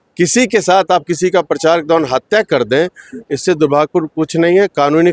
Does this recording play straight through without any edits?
yes; 0 cuts

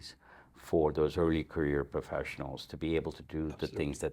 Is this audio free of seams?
yes; 0 cuts

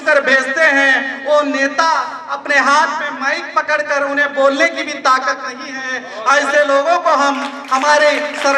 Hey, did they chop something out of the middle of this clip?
no; 0 cuts

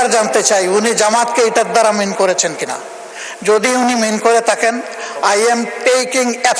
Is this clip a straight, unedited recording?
yes; 0 cuts

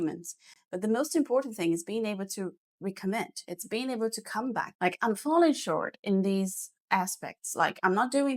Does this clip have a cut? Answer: no; 0 cuts

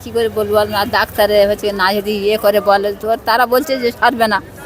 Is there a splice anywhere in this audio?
no; 0 cuts

